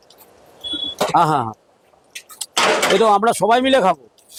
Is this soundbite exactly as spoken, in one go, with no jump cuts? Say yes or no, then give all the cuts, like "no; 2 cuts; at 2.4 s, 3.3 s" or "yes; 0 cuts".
yes; 0 cuts